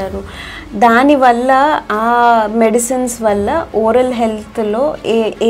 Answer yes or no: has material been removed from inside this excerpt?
no